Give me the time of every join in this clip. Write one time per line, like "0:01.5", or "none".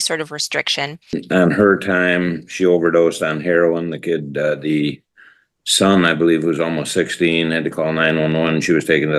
0:01.2